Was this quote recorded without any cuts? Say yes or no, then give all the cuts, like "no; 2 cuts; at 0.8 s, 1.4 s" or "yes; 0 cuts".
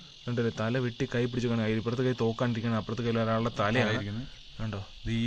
yes; 0 cuts